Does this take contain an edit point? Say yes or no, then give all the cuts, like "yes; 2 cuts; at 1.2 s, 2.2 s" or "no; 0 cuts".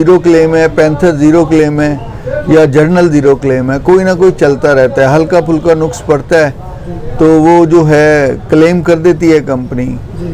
no; 0 cuts